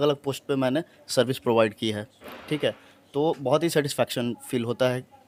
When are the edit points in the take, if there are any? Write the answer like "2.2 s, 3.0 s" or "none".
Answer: none